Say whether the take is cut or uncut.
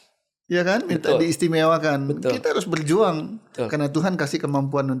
uncut